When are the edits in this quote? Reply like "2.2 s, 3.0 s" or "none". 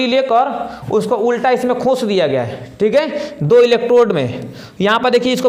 none